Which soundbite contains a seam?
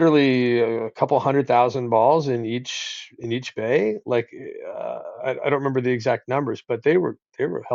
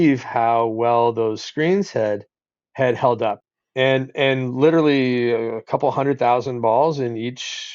second; 1 cut; at 3.4 s

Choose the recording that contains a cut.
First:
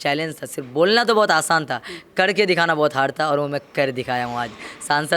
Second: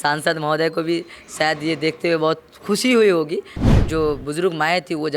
second; 1 cut; at 3.6 s

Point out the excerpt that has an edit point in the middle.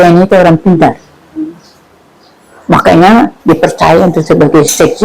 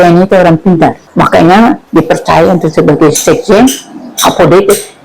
second; 1 cut; at 1.0 s

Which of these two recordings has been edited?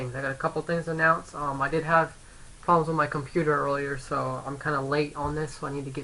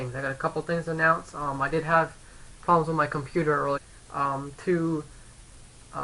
first; 1 cut; at 3.8 s

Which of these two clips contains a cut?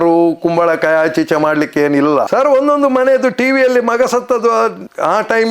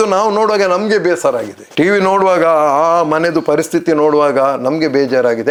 first; 1 cut; at 2.3 s

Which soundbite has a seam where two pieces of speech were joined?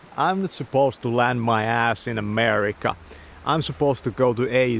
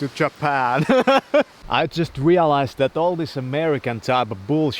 second; 1 cut; at 1.6 s

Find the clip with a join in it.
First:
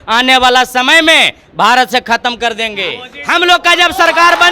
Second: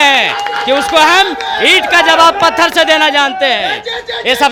first; 1 cut; at 3.1 s

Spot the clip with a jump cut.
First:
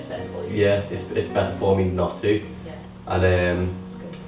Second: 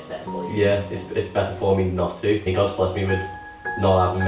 second; 1 cut; at 2.5 s

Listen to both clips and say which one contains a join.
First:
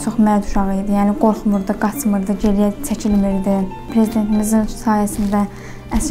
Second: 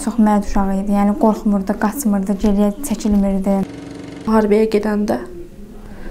second; 1 cut; at 3.9 s

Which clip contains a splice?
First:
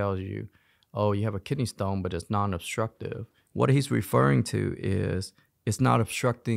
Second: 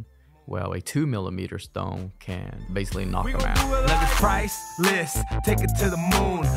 second; 1 cut; at 3.4 s

